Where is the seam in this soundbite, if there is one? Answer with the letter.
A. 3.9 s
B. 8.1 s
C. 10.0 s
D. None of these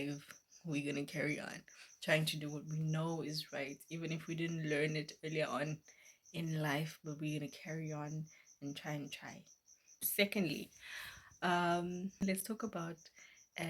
C